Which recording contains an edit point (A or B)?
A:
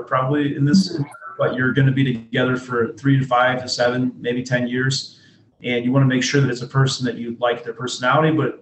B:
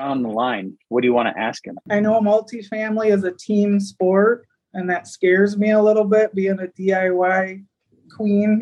B